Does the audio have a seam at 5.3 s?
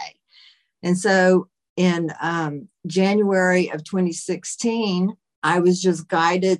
yes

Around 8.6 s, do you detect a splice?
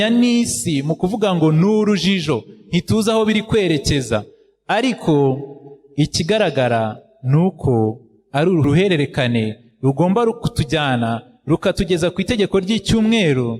yes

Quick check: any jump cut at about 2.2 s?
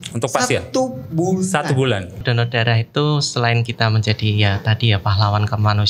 yes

